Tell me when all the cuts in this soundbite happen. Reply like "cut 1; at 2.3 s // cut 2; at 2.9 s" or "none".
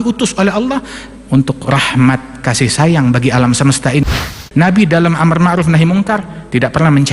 cut 1; at 4.0 s